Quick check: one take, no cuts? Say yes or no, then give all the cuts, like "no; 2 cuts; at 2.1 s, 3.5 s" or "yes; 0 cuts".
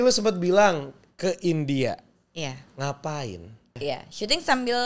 no; 1 cut; at 3.8 s